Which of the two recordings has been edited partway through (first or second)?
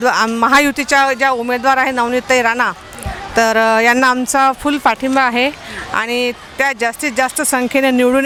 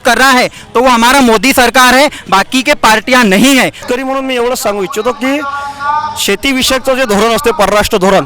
second